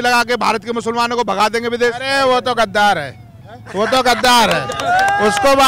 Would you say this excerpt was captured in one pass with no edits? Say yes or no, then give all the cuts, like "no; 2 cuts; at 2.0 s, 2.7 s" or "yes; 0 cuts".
yes; 0 cuts